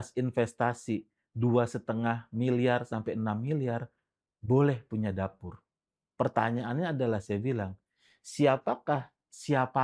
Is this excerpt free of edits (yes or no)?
yes